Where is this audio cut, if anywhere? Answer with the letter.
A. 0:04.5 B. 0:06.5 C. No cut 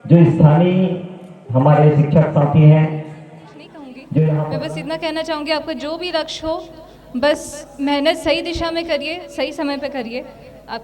A